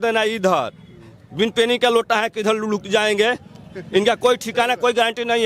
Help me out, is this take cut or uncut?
uncut